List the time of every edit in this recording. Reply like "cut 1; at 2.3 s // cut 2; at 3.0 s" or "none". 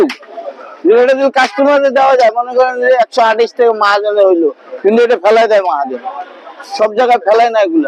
none